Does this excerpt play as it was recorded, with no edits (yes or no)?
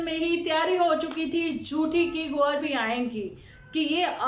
no